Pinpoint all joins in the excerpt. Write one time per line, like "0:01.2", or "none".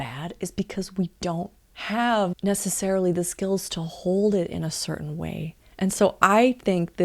0:02.4